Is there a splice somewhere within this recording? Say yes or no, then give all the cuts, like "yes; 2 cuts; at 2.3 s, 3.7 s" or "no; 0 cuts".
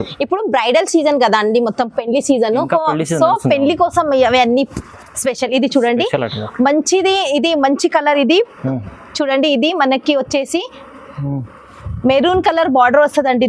no; 0 cuts